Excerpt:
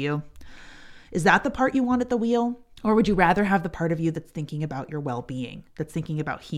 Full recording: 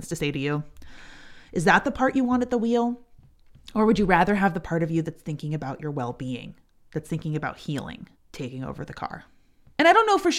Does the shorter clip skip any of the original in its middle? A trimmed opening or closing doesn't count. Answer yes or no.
yes